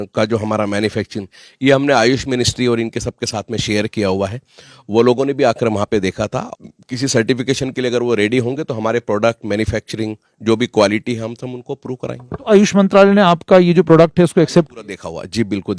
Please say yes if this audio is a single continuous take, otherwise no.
no